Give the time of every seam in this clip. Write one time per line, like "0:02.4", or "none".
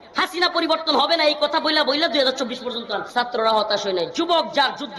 0:03.0